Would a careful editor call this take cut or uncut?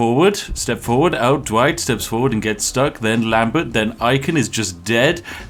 uncut